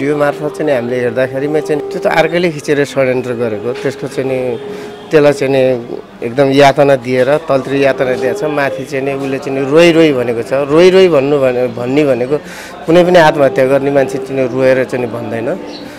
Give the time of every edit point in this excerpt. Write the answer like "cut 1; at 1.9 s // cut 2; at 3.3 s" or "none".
cut 1; at 1.8 s